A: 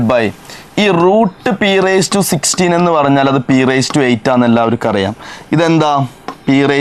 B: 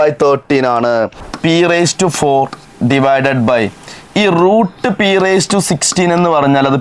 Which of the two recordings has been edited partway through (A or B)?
B